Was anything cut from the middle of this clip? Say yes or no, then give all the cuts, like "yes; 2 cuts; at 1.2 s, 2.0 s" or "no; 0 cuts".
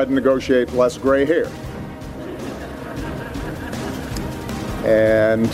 no; 0 cuts